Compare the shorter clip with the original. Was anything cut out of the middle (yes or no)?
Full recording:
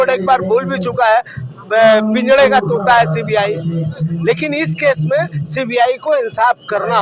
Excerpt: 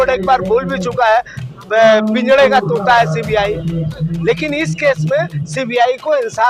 no